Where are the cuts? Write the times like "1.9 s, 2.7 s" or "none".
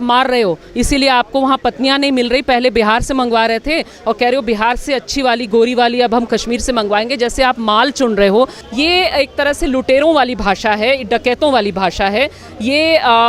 8.6 s